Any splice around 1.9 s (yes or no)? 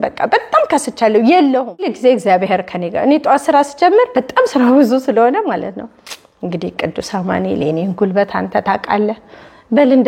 yes